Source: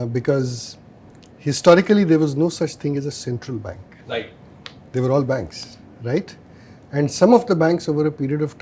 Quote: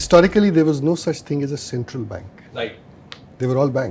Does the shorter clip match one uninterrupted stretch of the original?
yes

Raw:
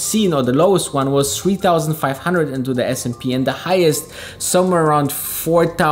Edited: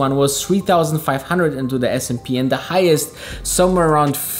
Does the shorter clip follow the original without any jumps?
yes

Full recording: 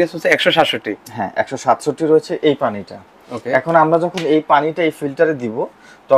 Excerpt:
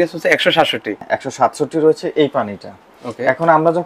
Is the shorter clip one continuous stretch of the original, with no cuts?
no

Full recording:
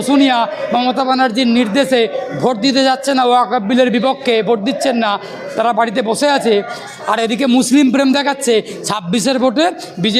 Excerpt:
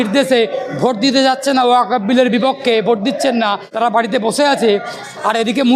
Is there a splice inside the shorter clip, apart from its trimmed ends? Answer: yes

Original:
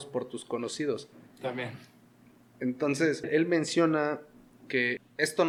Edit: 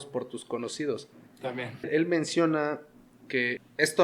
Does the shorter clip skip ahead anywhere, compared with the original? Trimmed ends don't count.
yes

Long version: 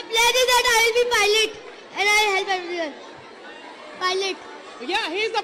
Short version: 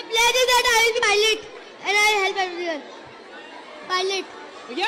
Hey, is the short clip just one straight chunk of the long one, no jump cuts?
no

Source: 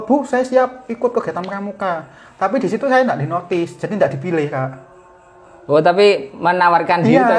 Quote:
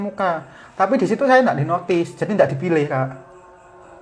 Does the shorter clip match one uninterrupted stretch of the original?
yes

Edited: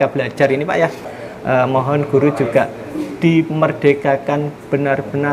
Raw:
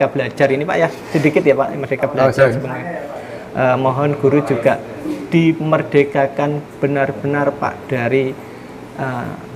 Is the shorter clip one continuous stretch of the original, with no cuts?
no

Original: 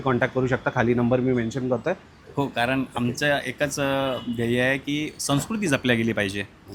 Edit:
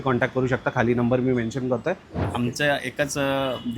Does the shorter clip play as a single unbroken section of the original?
no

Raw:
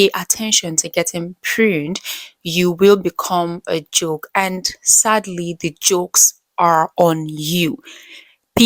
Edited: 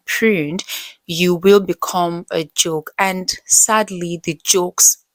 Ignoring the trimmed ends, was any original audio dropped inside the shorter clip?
no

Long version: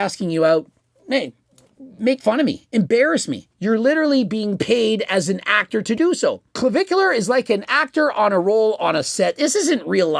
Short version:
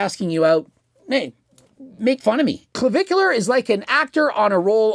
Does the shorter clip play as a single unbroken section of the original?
no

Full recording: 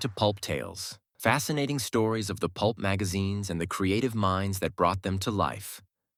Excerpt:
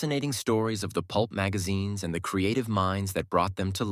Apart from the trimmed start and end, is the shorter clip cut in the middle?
no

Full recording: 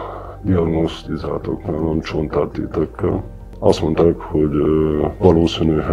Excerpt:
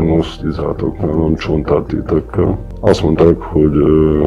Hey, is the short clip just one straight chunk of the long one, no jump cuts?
no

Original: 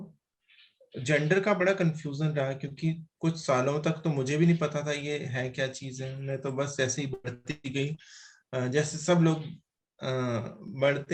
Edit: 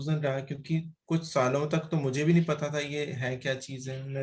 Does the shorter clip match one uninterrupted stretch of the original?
yes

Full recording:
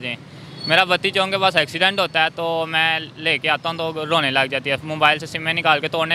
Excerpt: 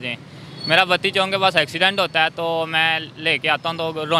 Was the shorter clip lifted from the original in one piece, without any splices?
yes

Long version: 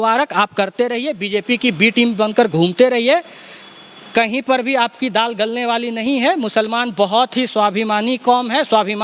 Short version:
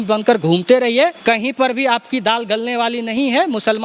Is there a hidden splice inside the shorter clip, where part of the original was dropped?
yes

